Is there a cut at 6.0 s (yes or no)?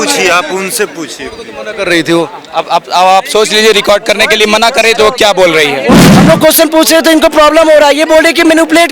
yes